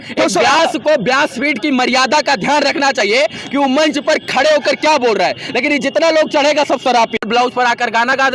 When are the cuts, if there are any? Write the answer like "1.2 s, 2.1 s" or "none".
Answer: 7.2 s